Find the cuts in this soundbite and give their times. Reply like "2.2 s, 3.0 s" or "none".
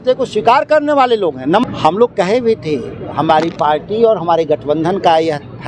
1.6 s